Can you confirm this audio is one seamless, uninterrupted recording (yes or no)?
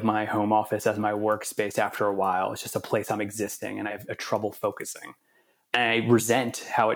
no